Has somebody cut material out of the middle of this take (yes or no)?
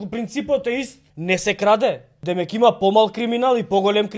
yes